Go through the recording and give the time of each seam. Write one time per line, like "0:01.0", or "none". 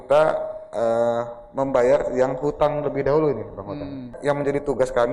0:04.2